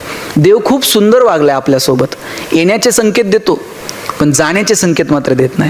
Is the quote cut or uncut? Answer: uncut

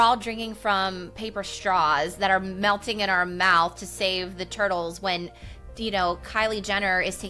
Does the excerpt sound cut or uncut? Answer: uncut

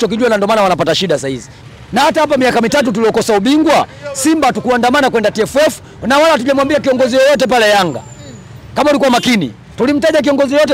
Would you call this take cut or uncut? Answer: cut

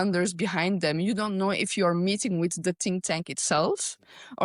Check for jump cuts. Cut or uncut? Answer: uncut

